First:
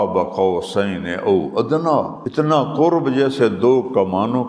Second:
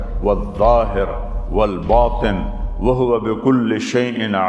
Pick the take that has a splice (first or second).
first